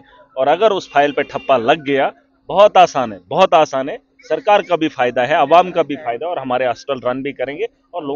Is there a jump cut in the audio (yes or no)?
no